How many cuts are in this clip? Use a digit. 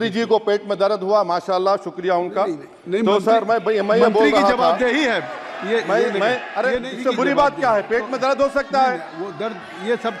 1